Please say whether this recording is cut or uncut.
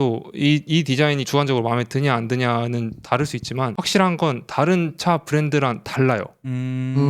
cut